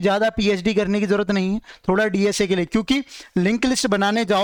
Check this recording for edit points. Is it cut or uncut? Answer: uncut